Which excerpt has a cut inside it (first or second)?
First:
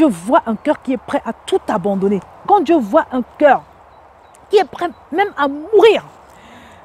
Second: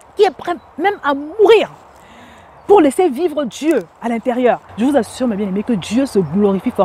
second